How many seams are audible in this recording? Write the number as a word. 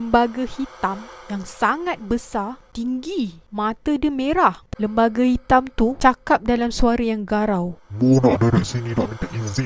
four